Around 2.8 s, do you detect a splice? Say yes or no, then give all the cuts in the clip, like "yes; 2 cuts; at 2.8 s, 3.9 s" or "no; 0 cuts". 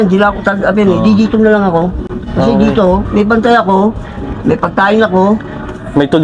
no; 0 cuts